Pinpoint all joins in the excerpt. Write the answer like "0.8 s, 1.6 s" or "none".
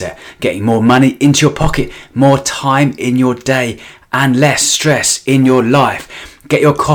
none